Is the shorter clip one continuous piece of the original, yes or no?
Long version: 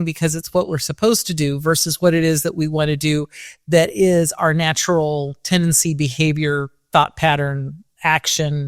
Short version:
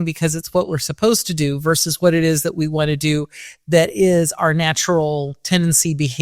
yes